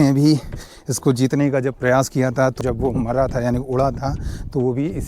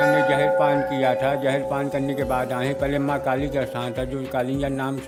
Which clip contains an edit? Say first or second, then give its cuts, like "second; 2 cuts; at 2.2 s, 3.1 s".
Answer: first; 1 cut; at 2.6 s